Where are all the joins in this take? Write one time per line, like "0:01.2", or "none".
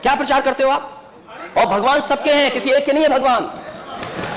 none